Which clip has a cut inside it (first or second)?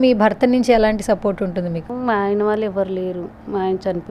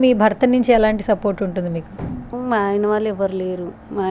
first